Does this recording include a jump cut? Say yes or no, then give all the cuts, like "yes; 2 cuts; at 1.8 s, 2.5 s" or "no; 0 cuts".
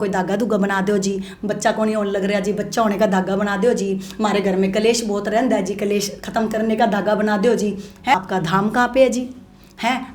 yes; 1 cut; at 8.1 s